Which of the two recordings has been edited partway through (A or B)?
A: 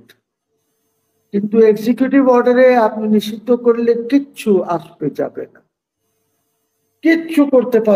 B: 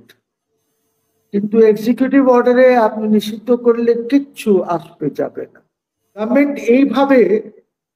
B